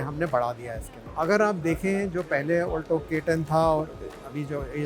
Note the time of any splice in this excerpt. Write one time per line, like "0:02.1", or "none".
0:01.0